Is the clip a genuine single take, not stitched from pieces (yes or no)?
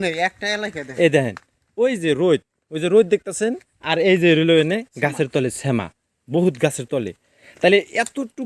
yes